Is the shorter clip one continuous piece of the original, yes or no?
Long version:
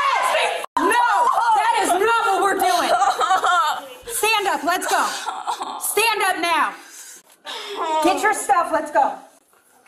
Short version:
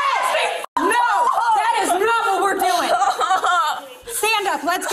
yes